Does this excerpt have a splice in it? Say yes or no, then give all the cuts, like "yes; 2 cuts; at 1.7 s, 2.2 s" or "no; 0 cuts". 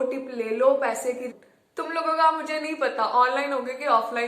yes; 1 cut; at 1.3 s